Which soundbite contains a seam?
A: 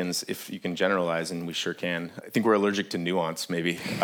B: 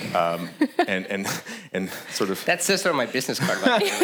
A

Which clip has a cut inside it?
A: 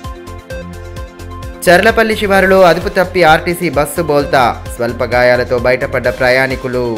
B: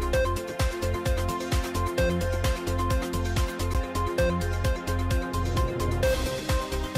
A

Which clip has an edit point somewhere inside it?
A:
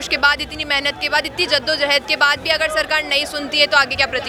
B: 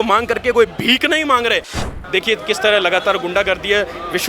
B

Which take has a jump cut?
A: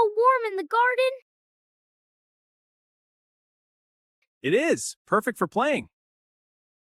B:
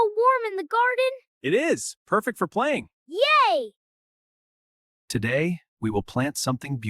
B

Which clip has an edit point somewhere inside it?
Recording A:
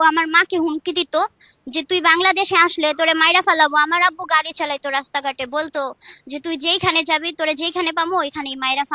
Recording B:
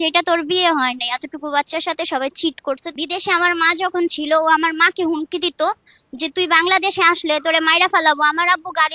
B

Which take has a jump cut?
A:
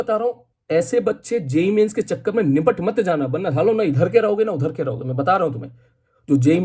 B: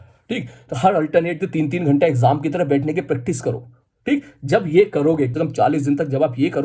B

